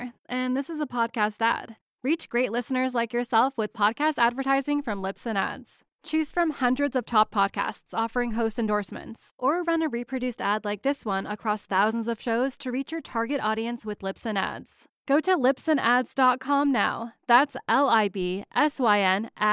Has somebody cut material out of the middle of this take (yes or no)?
no